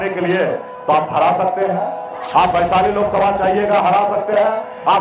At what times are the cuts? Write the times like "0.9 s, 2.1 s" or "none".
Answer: none